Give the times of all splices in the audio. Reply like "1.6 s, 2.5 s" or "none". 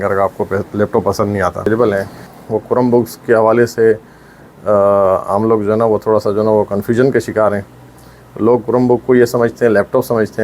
1.7 s